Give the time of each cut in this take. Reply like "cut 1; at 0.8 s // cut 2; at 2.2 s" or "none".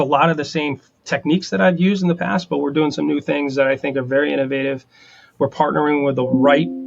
cut 1; at 1.0 s